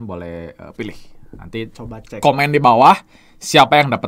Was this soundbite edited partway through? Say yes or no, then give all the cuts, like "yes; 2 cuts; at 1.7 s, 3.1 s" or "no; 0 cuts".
no; 0 cuts